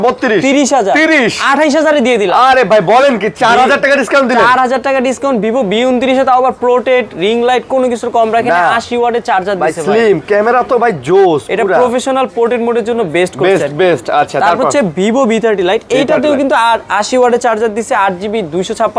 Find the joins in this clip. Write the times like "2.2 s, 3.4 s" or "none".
none